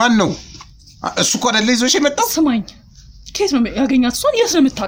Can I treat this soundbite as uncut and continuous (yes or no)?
yes